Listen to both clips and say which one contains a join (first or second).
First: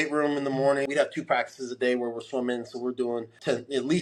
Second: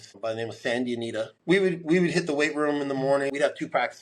second